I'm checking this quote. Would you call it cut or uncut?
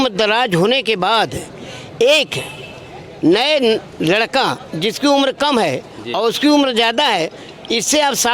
uncut